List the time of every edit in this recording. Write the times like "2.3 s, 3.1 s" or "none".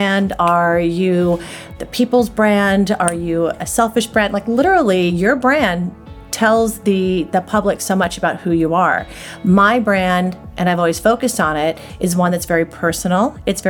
none

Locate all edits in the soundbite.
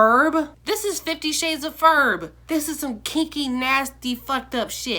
none

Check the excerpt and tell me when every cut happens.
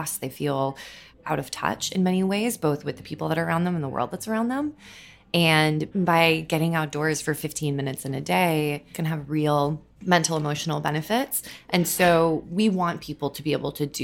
1.2 s

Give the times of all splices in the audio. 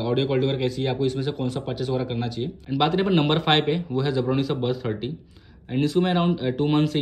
2.6 s

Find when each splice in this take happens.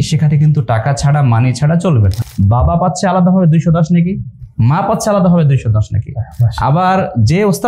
2.2 s

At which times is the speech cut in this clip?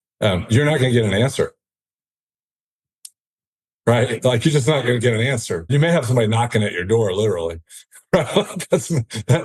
5.7 s

